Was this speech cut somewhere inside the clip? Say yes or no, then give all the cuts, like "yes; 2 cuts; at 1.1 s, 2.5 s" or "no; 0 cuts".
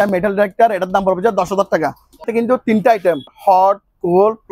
yes; 2 cuts; at 2.3 s, 3.3 s